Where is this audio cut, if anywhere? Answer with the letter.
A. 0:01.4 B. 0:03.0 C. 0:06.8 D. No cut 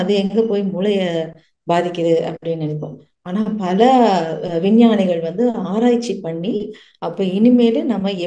C